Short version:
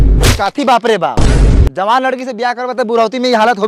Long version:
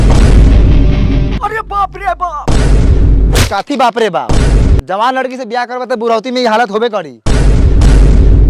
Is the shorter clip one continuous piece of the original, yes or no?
yes